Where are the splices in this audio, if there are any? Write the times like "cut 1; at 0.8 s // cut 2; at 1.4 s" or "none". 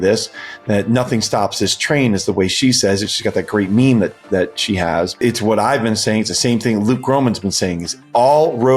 cut 1; at 5.1 s